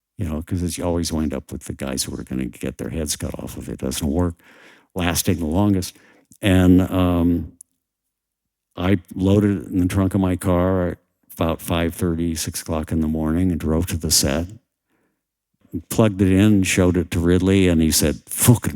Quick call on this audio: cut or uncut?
cut